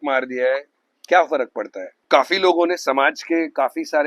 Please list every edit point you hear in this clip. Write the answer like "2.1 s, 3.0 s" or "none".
1.9 s